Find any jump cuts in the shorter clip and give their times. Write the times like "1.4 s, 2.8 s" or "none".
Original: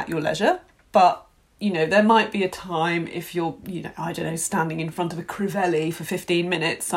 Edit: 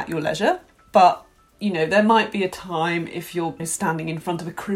3.6 s